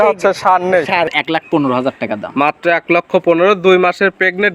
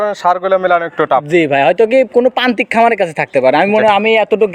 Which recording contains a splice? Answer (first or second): first